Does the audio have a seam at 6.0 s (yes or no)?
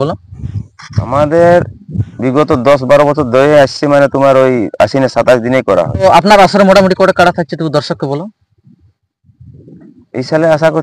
yes